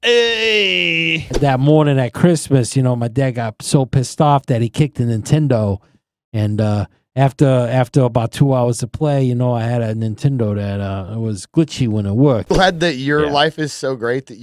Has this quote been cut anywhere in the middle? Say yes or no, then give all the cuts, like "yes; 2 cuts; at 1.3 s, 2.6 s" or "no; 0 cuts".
yes; 2 cuts; at 1.3 s, 12.4 s